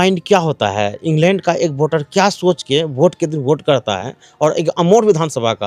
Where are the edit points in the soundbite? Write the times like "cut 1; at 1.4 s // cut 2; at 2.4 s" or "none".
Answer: none